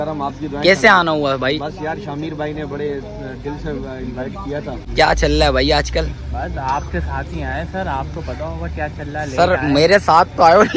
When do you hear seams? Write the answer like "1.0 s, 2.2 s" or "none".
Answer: 4.8 s